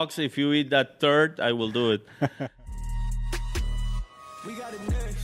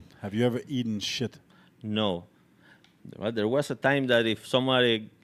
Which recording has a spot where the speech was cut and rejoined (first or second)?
first